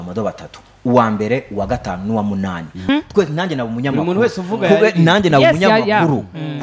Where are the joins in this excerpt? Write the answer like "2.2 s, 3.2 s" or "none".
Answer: 2.9 s